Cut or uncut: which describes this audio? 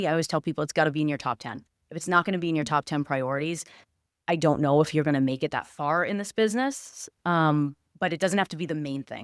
uncut